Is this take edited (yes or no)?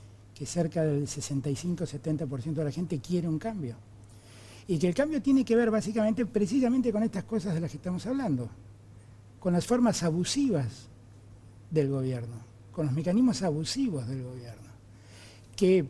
no